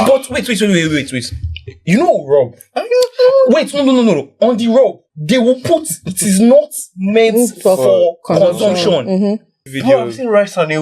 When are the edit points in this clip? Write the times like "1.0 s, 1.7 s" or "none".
5.1 s, 9.7 s